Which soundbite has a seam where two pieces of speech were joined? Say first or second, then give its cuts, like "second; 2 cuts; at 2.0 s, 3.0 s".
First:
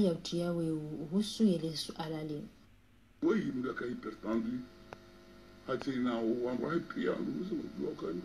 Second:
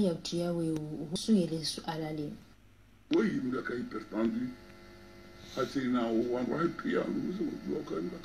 second; 1 cut; at 1.1 s